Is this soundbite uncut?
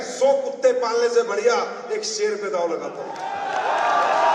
yes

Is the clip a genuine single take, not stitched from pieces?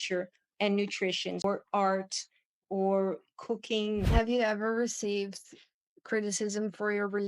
no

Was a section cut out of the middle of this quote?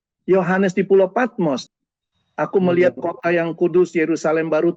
yes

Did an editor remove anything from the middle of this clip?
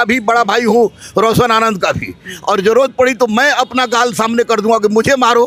no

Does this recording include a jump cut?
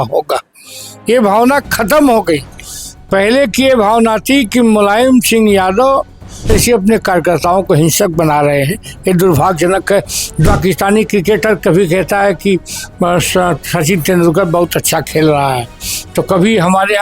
yes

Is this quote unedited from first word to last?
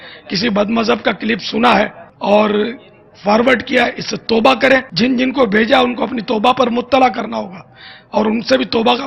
yes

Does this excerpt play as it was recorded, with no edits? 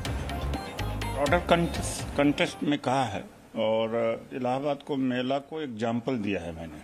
no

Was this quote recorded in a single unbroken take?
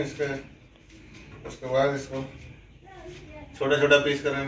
yes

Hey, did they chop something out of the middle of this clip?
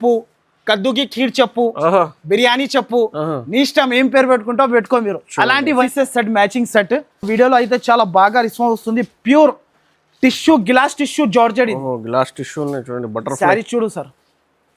yes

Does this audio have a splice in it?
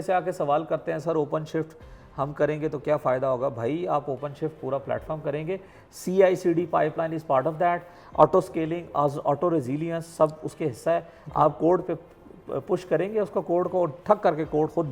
no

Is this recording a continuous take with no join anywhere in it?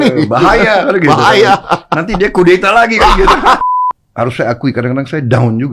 no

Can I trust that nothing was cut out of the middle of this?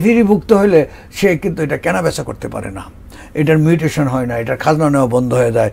yes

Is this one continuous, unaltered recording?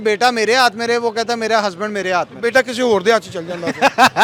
yes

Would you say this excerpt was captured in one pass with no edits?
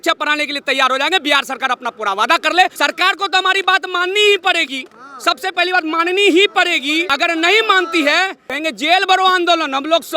no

